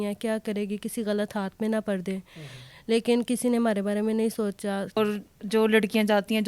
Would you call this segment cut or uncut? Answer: cut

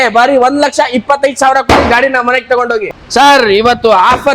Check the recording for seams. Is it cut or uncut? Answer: cut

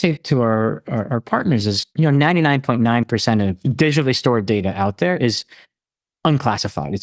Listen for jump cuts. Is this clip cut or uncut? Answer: cut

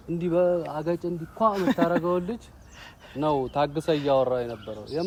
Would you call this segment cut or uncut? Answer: uncut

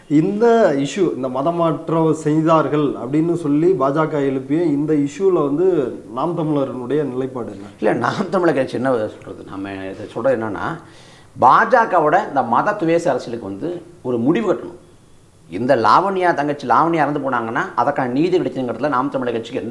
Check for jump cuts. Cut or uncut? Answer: uncut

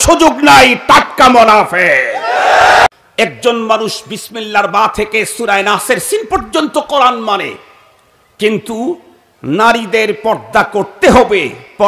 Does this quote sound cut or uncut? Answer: cut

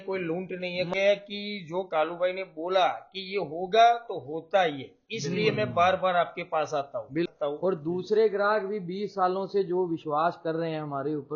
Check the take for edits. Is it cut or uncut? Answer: cut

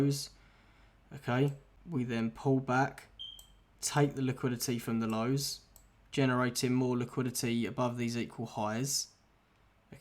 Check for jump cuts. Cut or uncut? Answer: cut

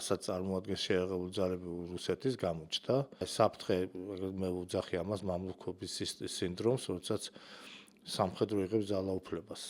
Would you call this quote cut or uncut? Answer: cut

